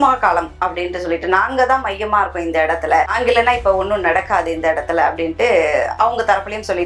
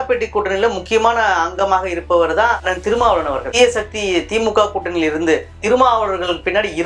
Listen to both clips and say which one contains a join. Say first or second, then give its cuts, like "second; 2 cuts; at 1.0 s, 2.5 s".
second; 2 cuts; at 3.5 s, 5.5 s